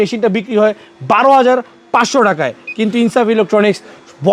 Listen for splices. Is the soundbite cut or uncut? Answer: uncut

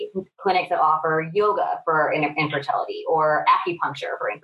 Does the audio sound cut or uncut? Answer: uncut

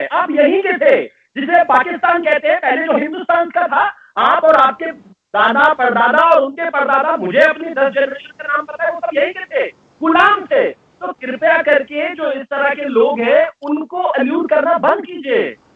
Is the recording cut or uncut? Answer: uncut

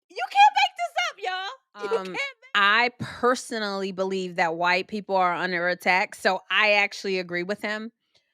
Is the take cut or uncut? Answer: cut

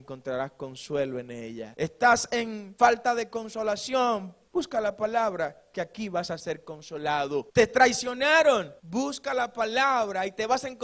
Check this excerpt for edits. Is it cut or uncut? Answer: cut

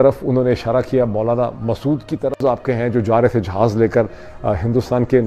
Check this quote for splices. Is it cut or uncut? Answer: cut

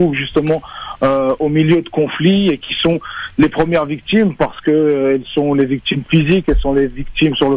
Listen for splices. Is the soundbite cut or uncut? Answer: uncut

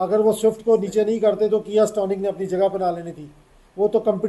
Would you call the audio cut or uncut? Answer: uncut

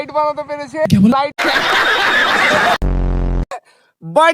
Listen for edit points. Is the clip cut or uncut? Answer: cut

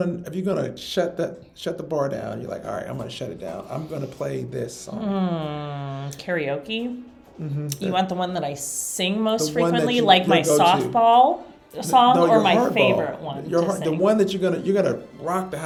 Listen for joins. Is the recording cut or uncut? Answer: uncut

